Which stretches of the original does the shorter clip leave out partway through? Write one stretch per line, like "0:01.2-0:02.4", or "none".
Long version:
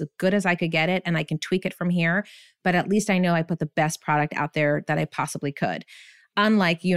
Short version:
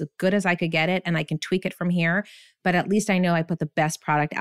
none

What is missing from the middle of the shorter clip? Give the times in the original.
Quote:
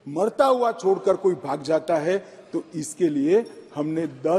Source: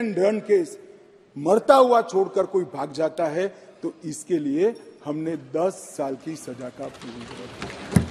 none

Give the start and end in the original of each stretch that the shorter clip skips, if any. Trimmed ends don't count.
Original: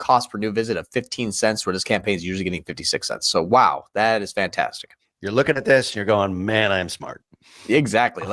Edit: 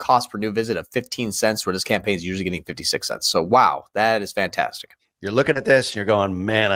none

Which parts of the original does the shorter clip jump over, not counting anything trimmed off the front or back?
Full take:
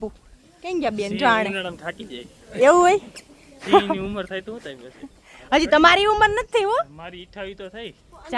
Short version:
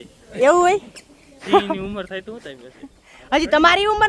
none

